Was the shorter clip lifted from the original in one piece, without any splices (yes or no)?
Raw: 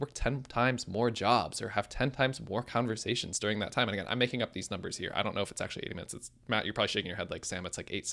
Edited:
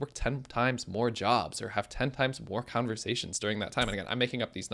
yes